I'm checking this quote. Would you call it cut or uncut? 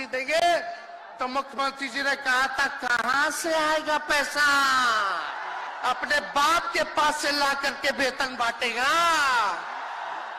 cut